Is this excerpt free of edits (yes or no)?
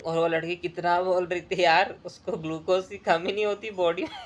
yes